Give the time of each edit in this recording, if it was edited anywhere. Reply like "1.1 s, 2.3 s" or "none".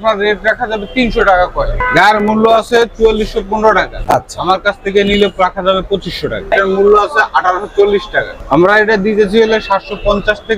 1.7 s, 6.5 s